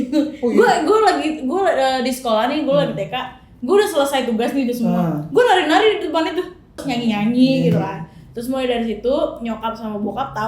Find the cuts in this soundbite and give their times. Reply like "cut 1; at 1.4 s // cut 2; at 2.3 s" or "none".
cut 1; at 6.8 s